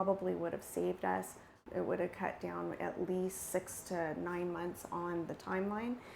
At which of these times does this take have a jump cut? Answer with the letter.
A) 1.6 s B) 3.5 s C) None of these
A